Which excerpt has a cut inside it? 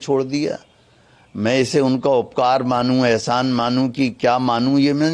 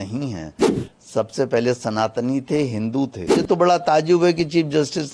second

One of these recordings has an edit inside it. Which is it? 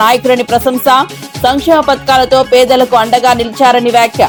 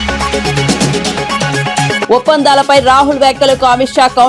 second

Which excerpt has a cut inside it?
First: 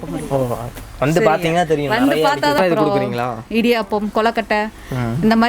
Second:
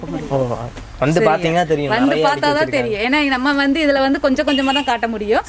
first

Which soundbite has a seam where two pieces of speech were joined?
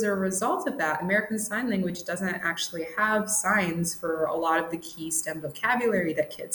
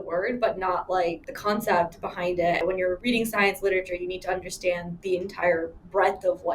second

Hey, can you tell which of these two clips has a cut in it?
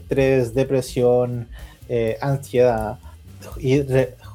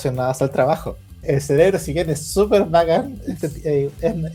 second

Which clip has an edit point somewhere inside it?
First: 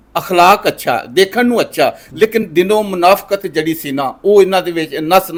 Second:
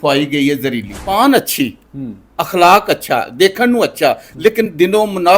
second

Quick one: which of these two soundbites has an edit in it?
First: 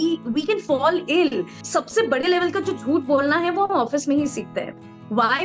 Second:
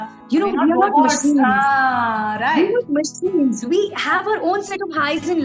first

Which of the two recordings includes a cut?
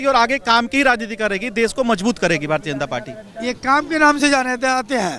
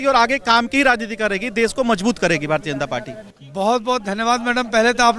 second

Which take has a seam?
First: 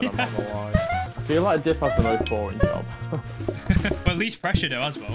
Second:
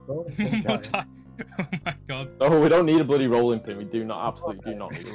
first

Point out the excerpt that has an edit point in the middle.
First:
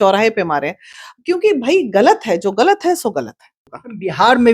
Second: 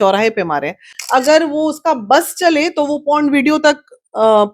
second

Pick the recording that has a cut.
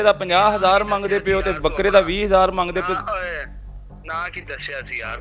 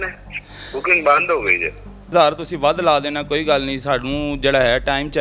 second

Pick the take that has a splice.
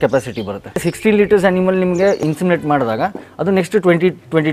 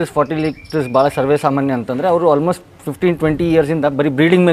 first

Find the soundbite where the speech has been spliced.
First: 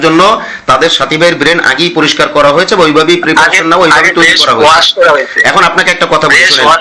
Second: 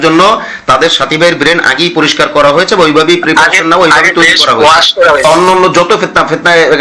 second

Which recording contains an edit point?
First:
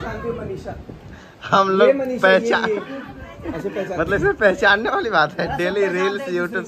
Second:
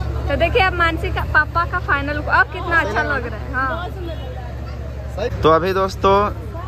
second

